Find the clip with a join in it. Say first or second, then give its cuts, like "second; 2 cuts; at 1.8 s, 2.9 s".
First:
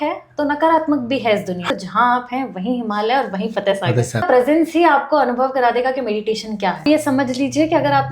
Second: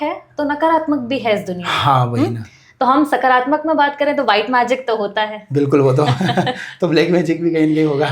first; 3 cuts; at 1.7 s, 4.2 s, 6.8 s